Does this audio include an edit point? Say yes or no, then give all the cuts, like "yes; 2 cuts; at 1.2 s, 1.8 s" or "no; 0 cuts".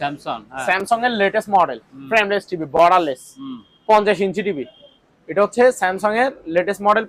no; 0 cuts